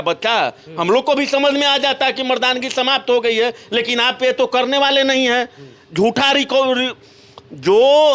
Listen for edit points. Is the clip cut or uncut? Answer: uncut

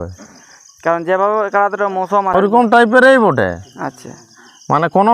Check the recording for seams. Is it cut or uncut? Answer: cut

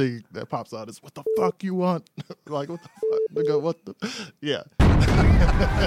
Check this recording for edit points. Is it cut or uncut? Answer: uncut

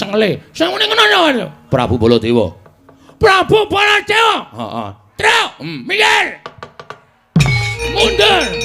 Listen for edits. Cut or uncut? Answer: cut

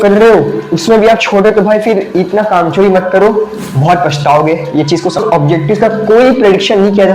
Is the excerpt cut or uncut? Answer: cut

